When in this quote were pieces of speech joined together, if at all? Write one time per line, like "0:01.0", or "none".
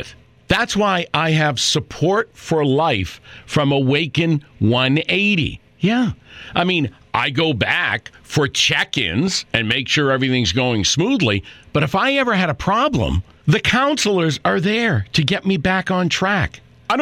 none